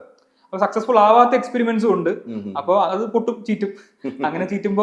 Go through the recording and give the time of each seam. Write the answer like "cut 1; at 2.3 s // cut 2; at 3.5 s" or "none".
none